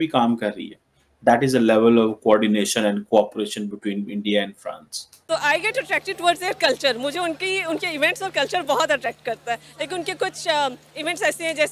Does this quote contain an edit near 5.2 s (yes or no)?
yes